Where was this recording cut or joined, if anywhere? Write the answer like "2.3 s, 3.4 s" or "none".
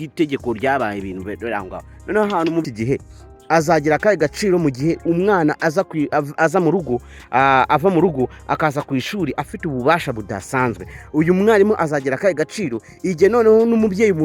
2.7 s